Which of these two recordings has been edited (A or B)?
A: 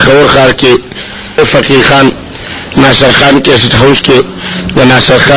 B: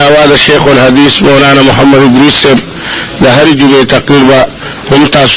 A